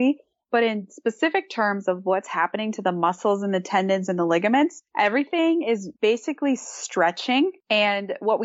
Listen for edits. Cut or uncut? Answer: cut